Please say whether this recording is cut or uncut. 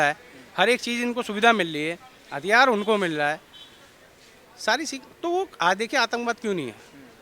uncut